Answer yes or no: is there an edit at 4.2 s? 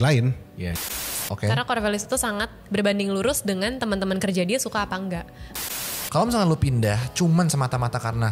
no